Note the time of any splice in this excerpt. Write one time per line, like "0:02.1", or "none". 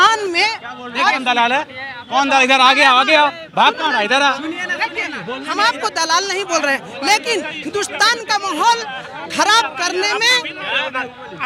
none